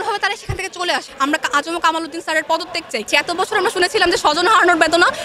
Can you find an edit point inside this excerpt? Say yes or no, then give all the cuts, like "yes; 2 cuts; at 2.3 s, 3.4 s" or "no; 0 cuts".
yes; 2 cuts; at 1.1 s, 3.1 s